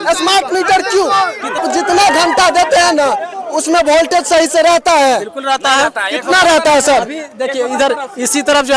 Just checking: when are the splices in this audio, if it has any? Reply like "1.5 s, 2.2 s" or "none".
1.6 s